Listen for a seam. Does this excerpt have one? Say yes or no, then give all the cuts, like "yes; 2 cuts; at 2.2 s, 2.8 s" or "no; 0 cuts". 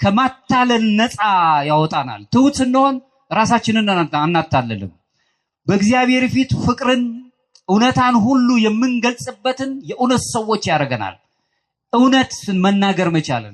no; 0 cuts